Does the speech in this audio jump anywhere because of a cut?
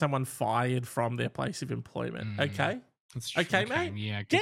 no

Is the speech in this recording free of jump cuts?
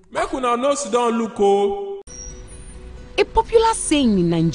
yes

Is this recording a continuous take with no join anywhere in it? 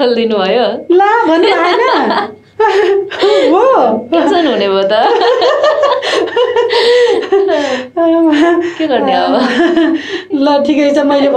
yes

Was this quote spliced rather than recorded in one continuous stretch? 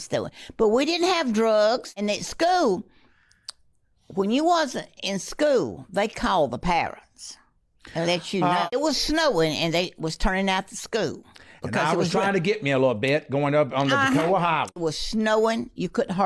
yes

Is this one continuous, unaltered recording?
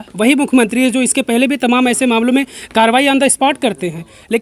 yes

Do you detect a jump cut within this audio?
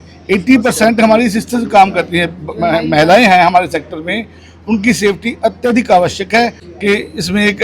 yes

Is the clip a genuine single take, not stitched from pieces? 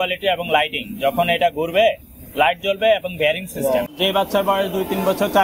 no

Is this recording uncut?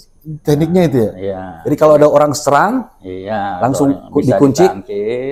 yes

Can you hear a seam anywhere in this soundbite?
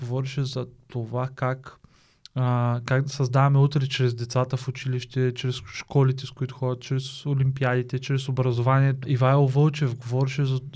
yes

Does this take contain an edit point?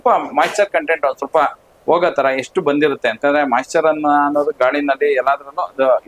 no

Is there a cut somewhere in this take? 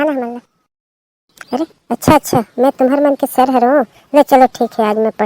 yes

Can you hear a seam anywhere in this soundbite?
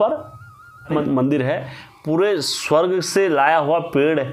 yes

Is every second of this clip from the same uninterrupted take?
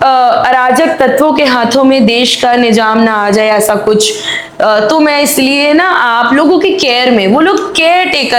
yes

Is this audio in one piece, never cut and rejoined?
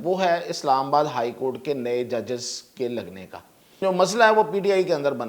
no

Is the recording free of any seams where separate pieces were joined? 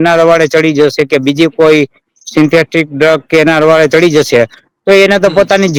yes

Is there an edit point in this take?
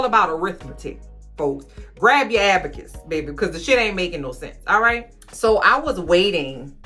no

